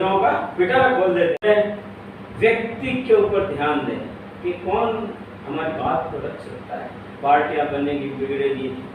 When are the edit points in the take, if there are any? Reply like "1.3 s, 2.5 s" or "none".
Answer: 1.4 s